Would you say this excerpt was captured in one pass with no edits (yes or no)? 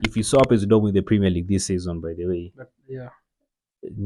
yes